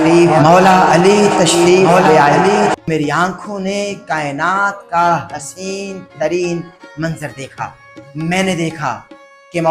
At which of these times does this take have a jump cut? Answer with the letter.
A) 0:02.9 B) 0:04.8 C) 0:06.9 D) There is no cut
A